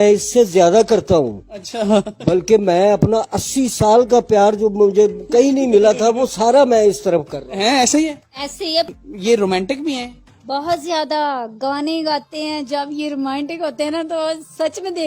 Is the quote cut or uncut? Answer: cut